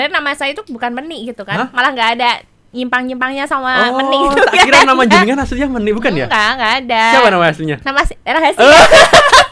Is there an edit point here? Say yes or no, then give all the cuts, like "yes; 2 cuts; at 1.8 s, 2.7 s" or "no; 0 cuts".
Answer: no; 0 cuts